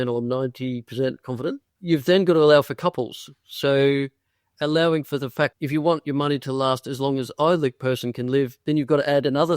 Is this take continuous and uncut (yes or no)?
no